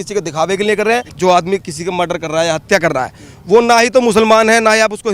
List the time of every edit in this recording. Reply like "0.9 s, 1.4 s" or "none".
1.1 s